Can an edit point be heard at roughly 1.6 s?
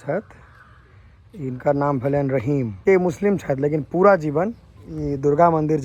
no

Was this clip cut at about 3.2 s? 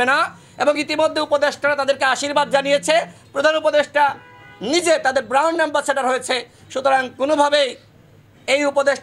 no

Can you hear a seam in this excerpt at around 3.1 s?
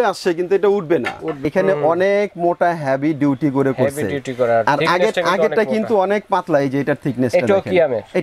no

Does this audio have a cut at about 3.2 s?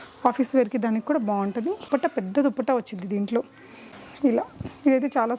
no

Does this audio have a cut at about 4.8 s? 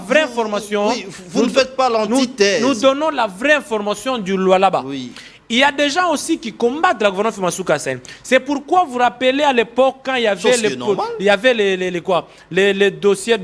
no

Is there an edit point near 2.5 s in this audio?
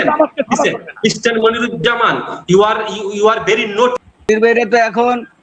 no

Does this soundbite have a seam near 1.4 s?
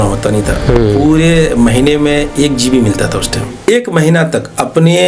no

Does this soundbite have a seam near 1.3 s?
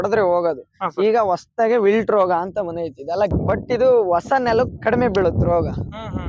no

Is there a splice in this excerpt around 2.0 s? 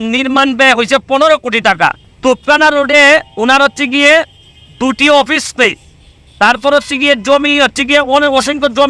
no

